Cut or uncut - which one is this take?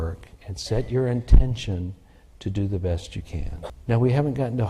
cut